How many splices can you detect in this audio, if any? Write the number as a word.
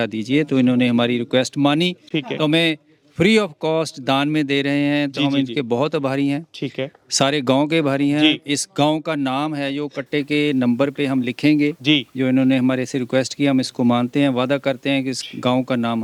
zero